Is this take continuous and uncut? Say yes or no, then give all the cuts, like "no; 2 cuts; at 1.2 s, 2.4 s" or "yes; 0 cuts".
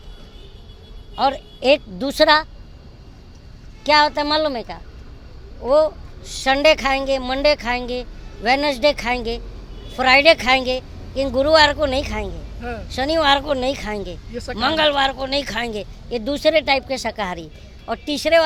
yes; 0 cuts